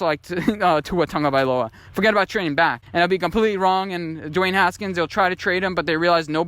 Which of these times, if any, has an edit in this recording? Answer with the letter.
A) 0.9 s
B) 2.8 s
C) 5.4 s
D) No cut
B